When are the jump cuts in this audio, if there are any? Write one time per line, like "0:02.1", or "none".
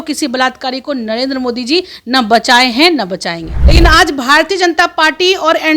0:03.5

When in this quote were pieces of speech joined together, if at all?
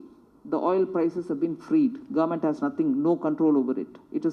none

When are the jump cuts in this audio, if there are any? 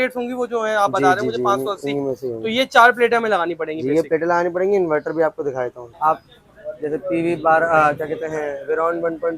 0:05.8

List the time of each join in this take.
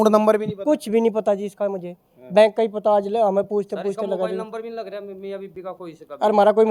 none

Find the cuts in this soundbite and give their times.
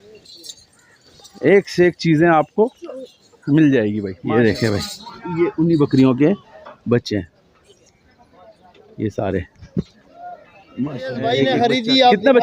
0:04.1
0:11.4

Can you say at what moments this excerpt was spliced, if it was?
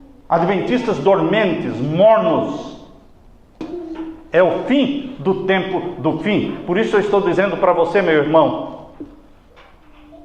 0:03.6

